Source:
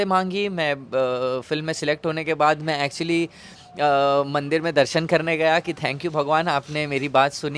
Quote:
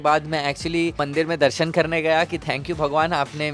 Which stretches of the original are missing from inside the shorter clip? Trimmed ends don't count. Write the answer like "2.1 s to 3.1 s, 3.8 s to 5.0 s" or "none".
3.4 s to 4.4 s